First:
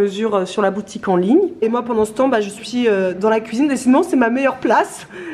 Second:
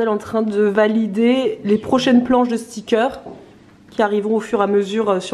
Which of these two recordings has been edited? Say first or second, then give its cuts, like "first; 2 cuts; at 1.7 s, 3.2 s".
first; 1 cut; at 1.6 s